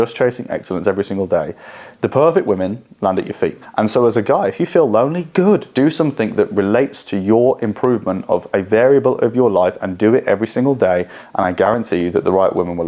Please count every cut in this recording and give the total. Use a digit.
2